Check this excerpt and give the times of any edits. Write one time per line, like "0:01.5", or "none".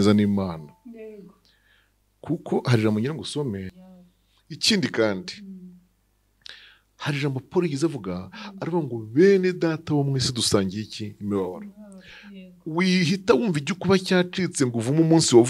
0:03.8